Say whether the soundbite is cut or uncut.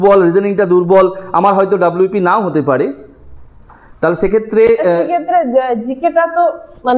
uncut